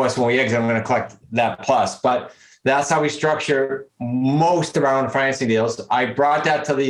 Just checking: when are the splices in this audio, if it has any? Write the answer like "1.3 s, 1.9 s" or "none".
none